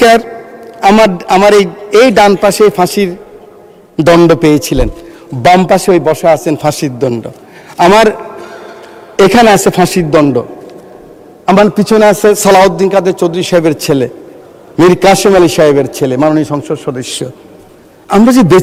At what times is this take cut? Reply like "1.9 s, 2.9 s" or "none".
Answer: none